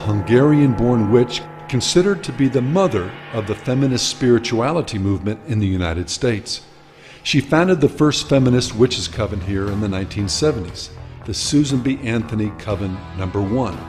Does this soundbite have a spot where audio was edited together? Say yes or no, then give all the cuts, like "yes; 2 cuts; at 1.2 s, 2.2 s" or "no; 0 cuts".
yes; 1 cut; at 8.7 s